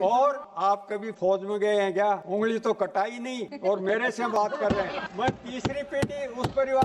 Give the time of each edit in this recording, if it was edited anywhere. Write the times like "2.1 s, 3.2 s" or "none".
0.9 s, 2.2 s, 3.4 s, 5.0 s